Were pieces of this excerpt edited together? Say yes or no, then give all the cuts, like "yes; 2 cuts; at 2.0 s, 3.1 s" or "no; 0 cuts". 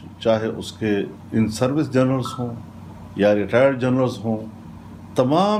no; 0 cuts